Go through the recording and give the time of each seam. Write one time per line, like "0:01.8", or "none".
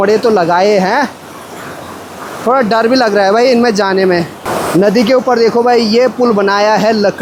none